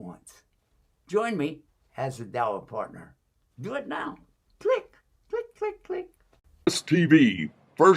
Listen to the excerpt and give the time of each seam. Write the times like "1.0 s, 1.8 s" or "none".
6.7 s